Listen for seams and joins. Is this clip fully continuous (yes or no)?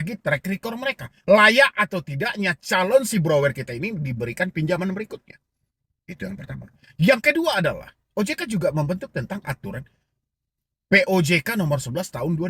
yes